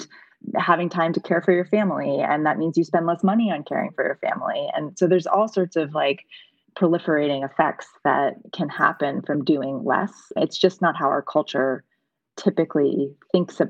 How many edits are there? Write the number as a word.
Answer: zero